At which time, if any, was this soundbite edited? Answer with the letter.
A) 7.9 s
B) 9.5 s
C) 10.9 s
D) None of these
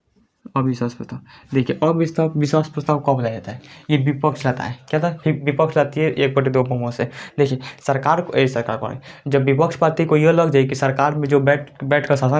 D